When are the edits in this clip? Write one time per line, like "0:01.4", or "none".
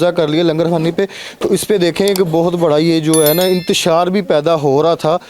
none